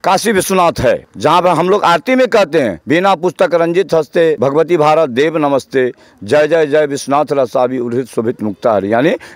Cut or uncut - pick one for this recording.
cut